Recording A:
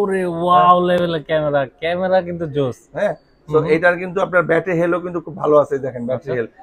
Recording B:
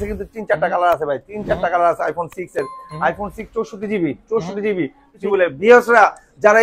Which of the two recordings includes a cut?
B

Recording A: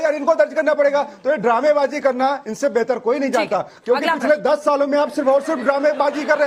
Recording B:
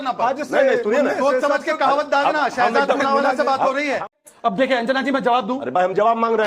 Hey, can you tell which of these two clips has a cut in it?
B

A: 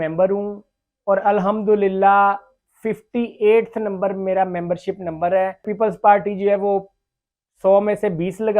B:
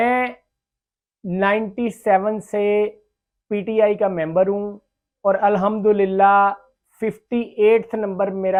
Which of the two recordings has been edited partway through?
A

